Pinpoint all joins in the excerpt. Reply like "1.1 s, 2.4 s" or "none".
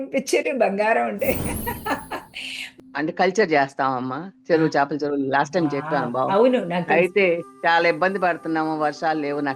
2.8 s

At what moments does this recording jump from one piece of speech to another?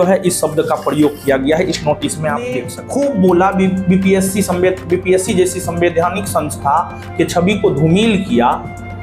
2.7 s

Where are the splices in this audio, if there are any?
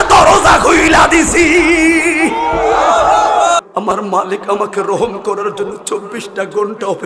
3.6 s

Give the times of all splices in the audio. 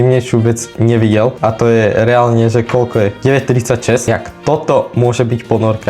1.4 s, 3.2 s, 4.1 s

